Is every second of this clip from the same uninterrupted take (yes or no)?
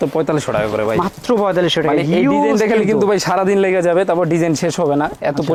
yes